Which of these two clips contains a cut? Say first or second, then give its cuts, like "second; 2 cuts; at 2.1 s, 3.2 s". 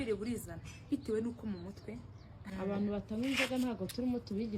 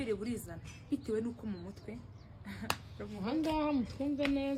first; 1 cut; at 2.4 s